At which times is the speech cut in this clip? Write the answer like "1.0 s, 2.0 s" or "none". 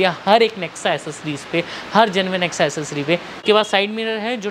3.3 s